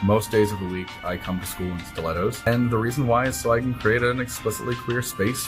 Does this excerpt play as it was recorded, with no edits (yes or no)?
no